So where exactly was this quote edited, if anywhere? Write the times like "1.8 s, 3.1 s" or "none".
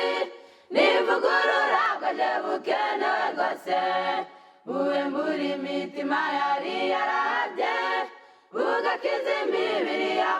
1.9 s, 4.1 s